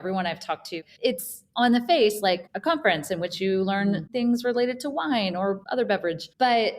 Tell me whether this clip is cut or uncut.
cut